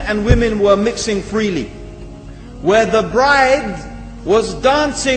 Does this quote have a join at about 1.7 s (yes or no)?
no